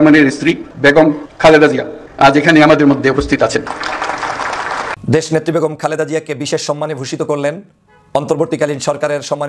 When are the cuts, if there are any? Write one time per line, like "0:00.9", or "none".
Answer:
0:04.9